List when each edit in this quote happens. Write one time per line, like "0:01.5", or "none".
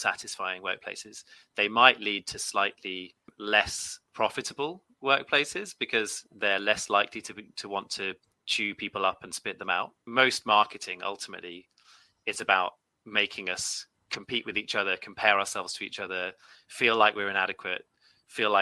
0:03.3
0:10.0